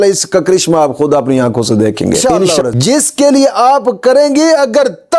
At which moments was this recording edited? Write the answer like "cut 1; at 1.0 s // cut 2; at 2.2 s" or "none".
cut 1; at 2.3 s